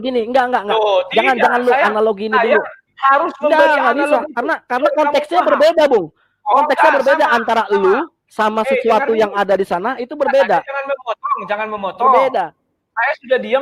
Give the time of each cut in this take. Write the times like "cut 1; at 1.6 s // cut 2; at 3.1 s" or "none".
none